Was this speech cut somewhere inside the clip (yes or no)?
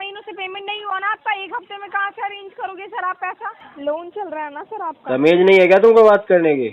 yes